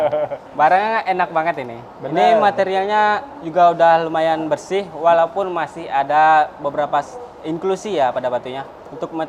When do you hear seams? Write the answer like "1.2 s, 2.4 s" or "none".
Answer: none